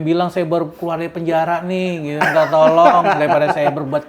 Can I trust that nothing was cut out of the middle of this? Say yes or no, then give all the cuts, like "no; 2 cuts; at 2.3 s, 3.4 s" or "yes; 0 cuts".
yes; 0 cuts